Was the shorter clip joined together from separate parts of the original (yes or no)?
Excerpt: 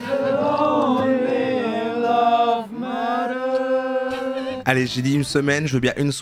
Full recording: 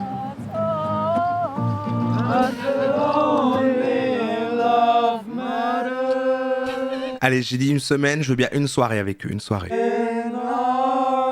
no